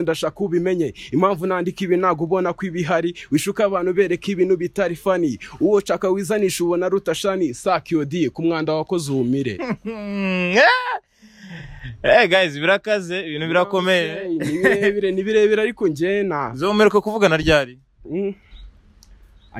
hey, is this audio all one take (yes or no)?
yes